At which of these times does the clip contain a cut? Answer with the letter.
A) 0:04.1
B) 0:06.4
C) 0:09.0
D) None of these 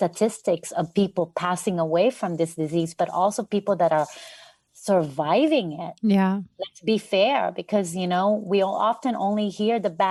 D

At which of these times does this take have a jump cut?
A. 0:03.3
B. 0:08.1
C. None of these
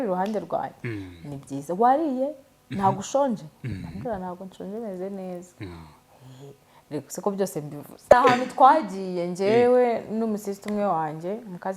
B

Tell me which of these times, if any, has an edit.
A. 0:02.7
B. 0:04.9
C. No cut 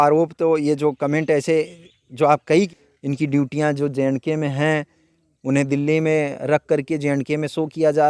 A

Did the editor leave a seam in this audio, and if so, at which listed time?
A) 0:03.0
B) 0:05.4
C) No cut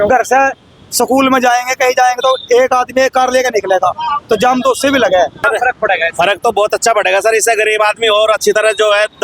B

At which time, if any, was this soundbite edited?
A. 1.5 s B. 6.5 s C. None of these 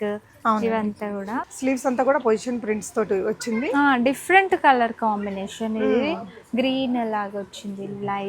A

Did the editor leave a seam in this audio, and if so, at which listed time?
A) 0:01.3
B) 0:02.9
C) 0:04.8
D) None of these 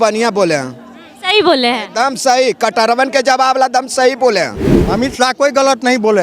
C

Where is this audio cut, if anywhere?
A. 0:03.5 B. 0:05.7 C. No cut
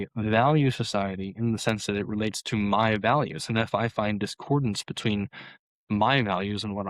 C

